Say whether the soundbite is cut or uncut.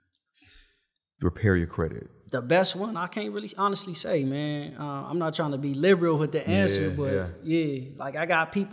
cut